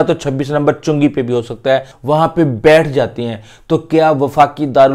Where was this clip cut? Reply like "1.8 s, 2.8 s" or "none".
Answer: 1.9 s